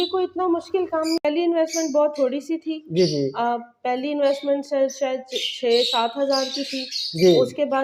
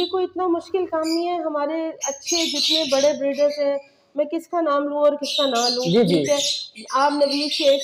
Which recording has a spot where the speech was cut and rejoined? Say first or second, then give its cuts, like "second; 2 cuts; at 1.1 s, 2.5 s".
first; 1 cut; at 1.2 s